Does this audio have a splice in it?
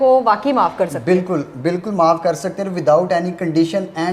no; 0 cuts

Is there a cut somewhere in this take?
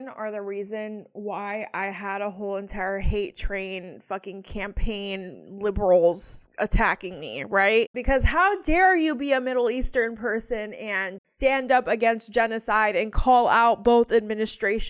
no; 0 cuts

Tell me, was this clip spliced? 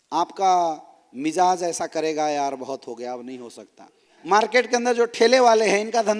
yes; 1 cut; at 4.1 s

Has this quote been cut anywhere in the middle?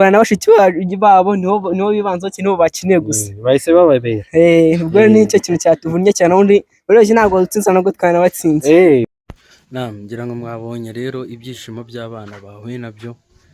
yes; 1 cut; at 9.1 s

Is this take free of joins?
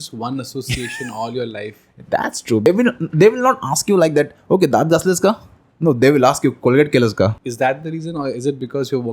no; 2 cuts; at 2.7 s, 7.4 s

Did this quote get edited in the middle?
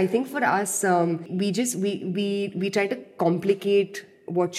yes; 1 cut; at 1.3 s

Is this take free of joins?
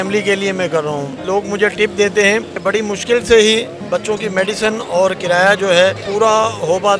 no; 4 cuts; at 1.2 s, 2.6 s, 3.8 s, 6.0 s

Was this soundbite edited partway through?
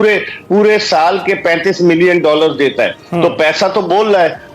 no; 0 cuts

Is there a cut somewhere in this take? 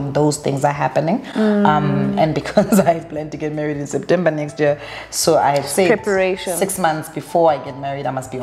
no; 0 cuts

